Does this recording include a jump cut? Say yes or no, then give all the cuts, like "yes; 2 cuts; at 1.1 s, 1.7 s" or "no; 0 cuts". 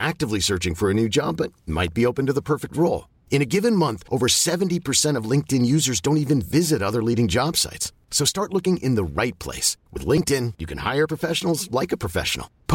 no; 0 cuts